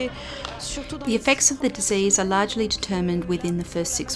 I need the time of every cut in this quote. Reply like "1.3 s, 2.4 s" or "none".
none

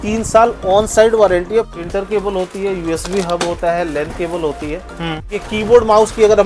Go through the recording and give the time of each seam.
1.8 s, 5.4 s

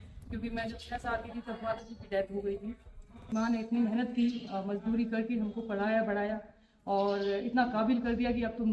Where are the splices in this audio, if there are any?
3.3 s

